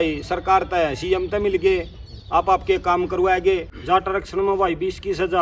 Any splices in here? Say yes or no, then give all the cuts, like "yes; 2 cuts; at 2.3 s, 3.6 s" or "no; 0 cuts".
yes; 1 cut; at 3.7 s